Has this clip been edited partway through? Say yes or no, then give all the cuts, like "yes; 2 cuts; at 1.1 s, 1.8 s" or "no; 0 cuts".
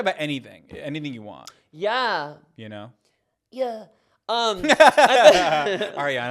yes; 1 cut; at 1.4 s